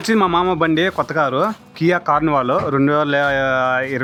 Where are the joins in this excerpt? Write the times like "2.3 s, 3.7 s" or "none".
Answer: none

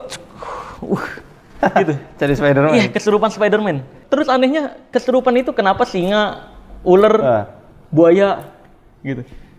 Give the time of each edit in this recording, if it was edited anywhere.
3.9 s

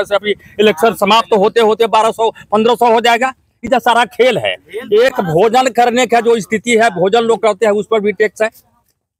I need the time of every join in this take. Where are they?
none

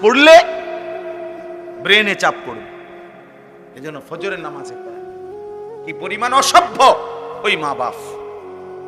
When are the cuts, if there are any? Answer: 4.5 s, 6.1 s

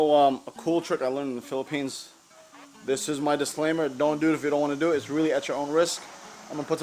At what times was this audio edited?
none

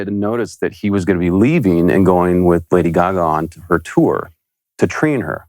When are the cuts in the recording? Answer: none

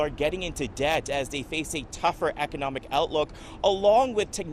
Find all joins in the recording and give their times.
none

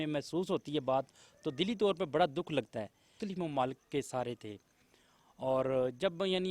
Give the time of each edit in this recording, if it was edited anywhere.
3.1 s

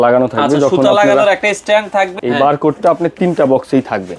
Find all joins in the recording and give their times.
2.1 s

